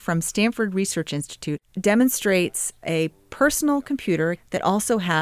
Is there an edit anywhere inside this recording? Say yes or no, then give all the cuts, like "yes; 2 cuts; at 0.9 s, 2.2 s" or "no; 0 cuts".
yes; 3 cuts; at 1.6 s, 2.8 s, 4.4 s